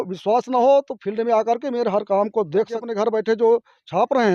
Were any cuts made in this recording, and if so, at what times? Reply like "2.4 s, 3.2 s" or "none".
2.8 s